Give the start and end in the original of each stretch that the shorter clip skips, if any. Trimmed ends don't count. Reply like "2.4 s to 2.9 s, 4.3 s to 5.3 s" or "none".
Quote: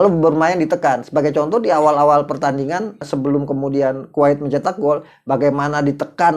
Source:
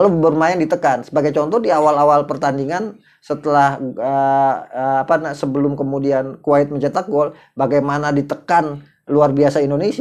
3.0 s to 5.3 s